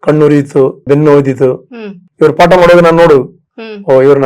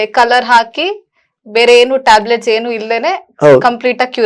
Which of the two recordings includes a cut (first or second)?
first